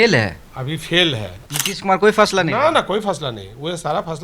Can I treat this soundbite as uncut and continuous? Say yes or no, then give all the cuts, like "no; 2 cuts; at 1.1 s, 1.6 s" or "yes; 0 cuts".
no; 1 cut; at 1.5 s